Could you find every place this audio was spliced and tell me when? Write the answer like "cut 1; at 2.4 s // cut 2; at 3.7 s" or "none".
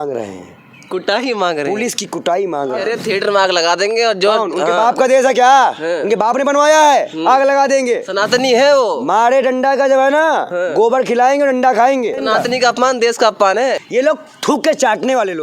cut 1; at 2.8 s // cut 2; at 8.1 s // cut 3; at 12.2 s // cut 4; at 13.8 s